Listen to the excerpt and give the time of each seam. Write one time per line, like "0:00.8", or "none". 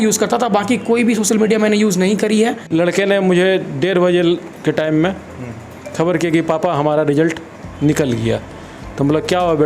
0:02.6